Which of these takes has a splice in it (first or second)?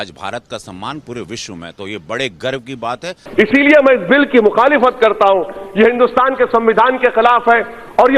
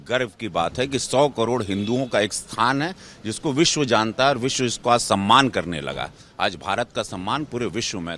first